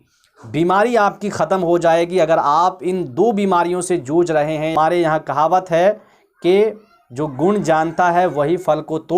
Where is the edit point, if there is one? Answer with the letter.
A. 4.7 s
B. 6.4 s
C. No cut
A